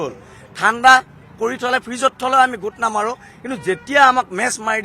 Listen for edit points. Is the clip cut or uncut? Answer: uncut